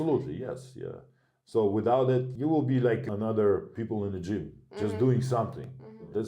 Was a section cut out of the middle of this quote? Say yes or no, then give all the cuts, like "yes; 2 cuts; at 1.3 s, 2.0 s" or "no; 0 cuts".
yes; 3 cuts; at 2.3 s, 3.1 s, 3.7 s